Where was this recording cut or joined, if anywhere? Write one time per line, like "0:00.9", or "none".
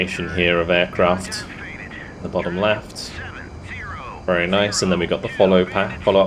none